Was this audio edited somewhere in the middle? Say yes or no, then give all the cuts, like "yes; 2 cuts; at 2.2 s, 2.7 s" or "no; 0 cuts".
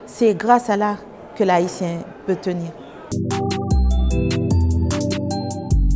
yes; 1 cut; at 3.1 s